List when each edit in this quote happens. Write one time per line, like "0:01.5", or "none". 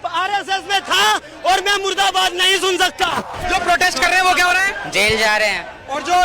0:03.3